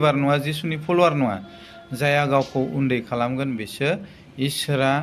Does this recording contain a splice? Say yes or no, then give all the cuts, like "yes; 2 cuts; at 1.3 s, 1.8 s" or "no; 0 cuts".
no; 0 cuts